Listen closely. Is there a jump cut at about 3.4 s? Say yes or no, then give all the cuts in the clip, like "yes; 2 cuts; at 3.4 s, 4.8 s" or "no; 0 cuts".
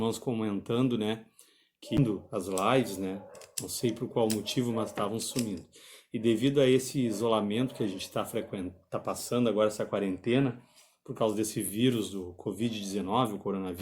no; 1 cut; at 2.0 s